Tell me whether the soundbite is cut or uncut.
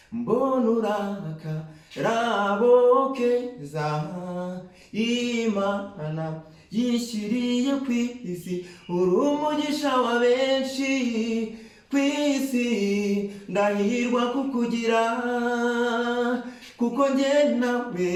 uncut